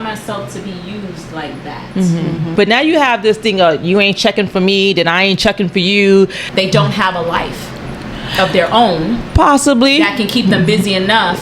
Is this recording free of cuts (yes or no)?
no